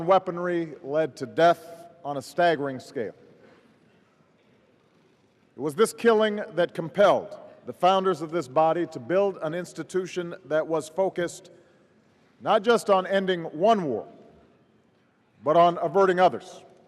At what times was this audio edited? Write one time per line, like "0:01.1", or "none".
0:13.9